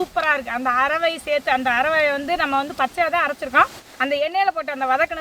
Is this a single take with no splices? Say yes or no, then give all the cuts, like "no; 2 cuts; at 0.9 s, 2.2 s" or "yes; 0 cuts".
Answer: no; 1 cut; at 3.9 s